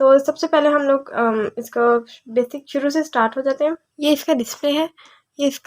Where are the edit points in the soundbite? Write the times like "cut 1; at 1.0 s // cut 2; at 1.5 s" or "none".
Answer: cut 1; at 3.9 s